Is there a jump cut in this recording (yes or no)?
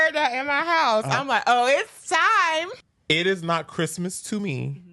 yes